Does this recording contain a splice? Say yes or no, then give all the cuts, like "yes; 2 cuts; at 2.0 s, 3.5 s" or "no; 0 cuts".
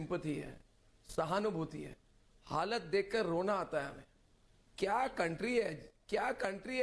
no; 0 cuts